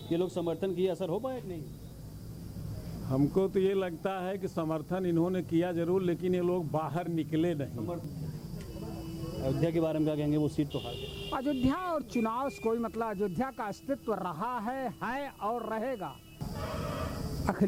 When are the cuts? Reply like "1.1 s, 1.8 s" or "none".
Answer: 8.0 s, 16.5 s